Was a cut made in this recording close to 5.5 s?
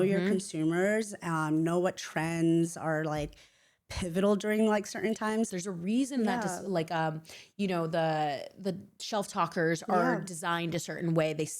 yes; 1 cut; at 5.5 s

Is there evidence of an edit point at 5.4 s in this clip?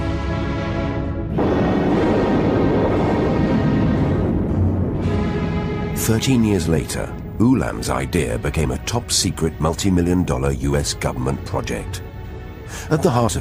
yes; 1 cut; at 5.4 s

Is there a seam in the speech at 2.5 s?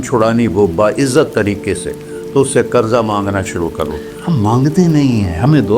no; 1 cut; at 4.1 s

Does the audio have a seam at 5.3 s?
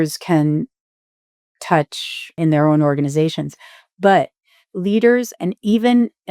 no; 1 cut; at 2.4 s

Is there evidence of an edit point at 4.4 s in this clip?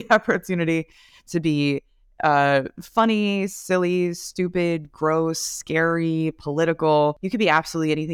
no; 1 cut; at 7.2 s

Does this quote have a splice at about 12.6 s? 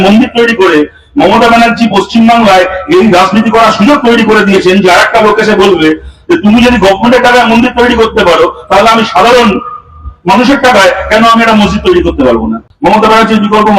yes; 1 cut; at 12.6 s

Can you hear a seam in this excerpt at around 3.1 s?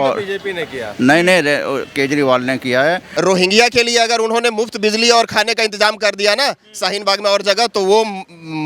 yes; 1 cut; at 3.1 s

